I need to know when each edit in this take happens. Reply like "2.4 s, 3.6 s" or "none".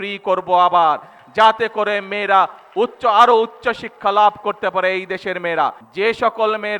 5.8 s